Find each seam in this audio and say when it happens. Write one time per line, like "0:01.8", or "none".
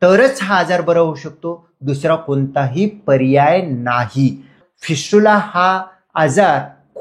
0:04.6